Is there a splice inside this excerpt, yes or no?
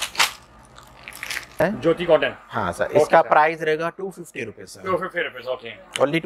yes